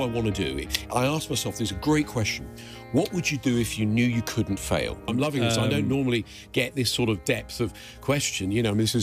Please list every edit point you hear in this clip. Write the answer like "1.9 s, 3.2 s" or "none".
5.1 s